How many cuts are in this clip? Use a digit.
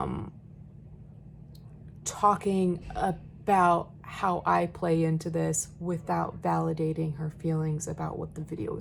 0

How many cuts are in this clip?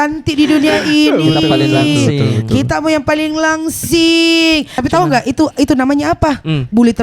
1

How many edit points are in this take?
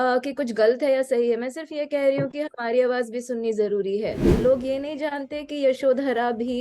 1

